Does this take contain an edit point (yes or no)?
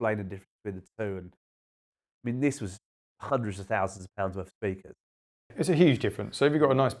yes